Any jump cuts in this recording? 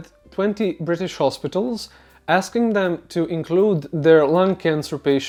no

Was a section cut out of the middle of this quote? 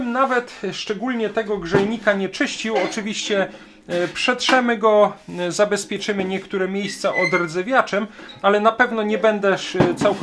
no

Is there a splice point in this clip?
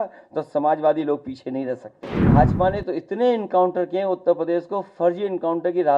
yes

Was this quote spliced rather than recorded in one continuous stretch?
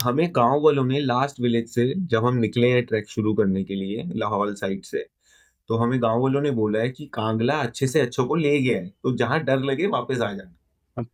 no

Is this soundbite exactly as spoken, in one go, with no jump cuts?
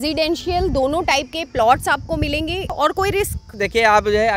no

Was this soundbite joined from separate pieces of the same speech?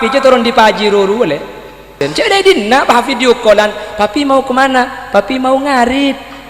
yes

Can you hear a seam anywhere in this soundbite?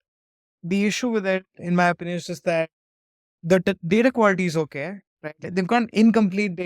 yes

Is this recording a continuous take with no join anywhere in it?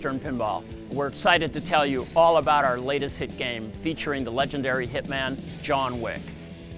yes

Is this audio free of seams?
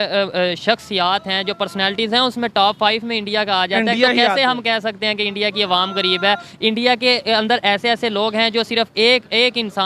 yes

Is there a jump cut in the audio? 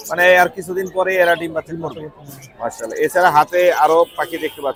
no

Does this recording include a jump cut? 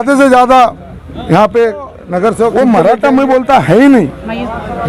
yes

